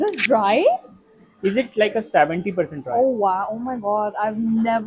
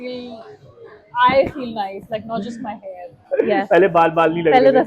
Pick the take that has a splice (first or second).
second